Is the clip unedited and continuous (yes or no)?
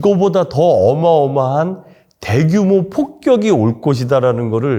yes